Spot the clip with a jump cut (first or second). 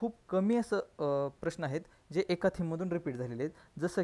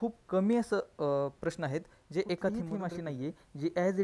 second